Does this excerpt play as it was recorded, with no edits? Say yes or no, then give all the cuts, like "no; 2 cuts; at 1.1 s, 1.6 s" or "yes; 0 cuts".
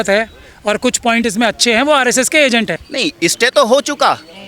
no; 1 cut; at 2.8 s